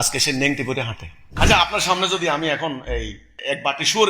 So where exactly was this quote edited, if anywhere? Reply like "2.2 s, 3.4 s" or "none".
1.3 s

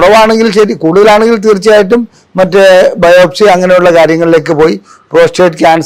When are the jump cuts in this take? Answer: none

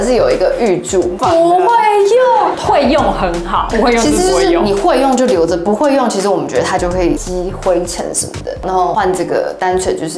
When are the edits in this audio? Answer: 1.2 s, 8.6 s

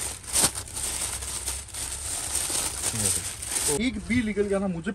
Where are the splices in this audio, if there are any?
3.8 s

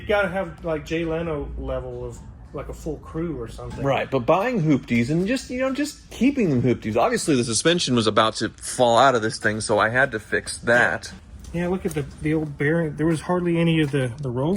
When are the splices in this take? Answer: 11.1 s

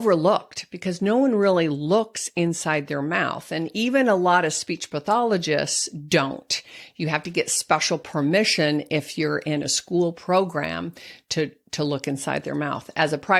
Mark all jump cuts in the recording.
none

